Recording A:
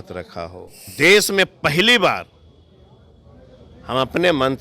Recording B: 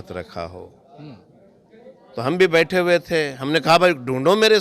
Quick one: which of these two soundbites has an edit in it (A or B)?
A